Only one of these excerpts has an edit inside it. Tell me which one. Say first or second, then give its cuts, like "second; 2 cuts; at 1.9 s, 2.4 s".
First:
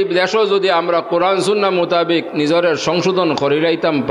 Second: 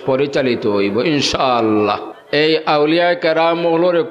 second; 1 cut; at 2.1 s